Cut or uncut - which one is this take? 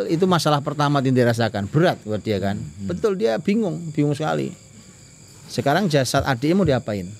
uncut